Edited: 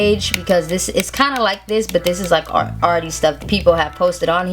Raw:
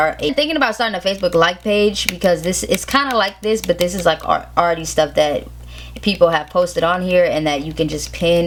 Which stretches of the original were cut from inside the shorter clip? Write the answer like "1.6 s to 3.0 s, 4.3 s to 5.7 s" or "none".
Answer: 5.1 s to 5.9 s